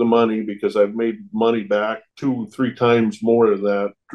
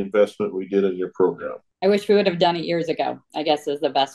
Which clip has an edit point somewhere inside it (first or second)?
second